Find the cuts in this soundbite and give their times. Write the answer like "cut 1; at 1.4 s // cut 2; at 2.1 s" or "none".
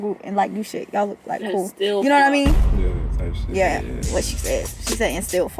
none

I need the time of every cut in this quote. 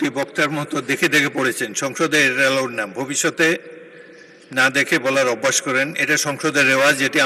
none

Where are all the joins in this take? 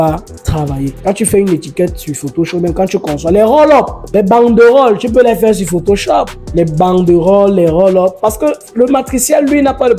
cut 1; at 0.9 s // cut 2; at 4.0 s // cut 3; at 6.4 s

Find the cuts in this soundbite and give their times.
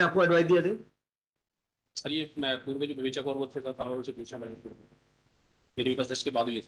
none

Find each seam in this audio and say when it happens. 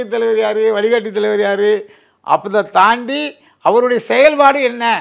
none

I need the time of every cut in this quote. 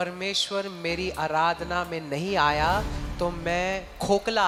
none

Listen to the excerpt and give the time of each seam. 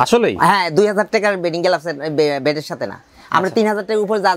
none

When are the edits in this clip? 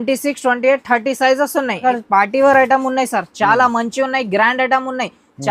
cut 1; at 1.8 s

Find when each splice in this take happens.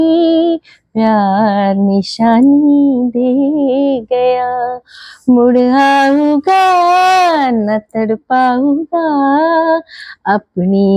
none

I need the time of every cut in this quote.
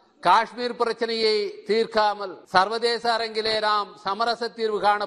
cut 1; at 2.3 s

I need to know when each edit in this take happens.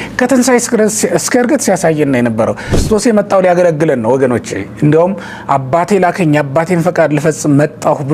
cut 1; at 2.7 s

